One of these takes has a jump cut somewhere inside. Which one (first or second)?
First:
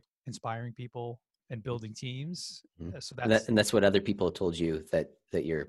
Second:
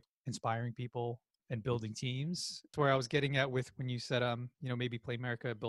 second